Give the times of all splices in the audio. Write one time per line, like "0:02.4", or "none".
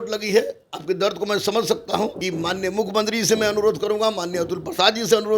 0:02.2

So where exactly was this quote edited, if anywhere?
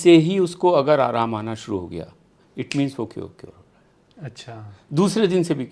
none

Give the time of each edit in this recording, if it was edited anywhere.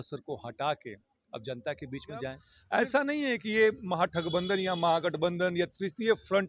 0:02.5

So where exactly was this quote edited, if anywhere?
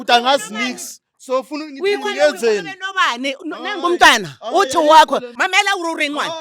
0:05.3

